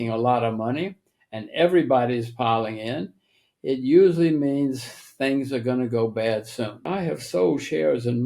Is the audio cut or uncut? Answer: cut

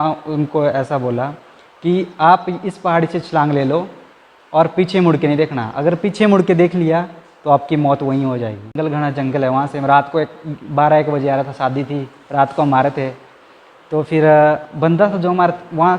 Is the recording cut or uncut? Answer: cut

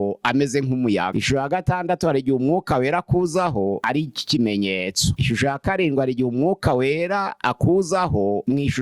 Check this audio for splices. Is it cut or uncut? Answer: uncut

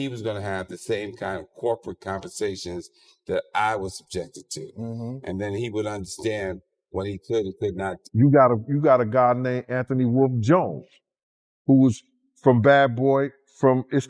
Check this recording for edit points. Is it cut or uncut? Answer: cut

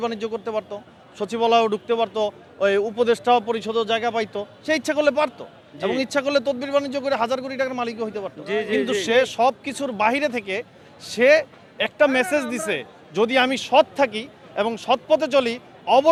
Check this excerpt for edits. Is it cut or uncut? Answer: uncut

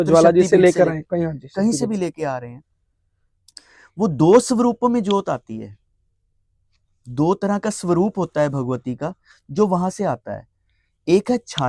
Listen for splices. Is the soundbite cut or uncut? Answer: uncut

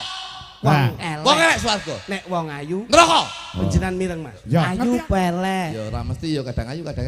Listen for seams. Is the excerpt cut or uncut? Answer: cut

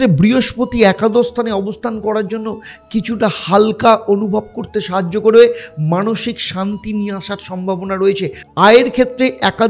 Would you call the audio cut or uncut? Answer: cut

